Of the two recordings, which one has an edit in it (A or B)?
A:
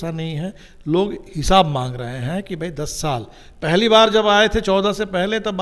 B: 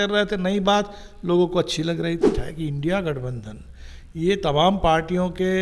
B